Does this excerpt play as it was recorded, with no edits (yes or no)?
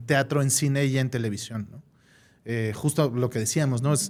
yes